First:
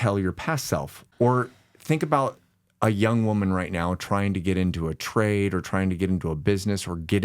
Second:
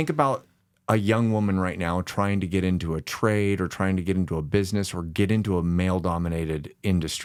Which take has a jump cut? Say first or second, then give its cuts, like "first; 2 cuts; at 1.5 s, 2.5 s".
first; 1 cut; at 1.0 s